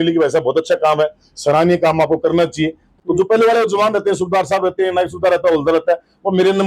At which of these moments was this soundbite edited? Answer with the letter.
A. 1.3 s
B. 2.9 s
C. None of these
B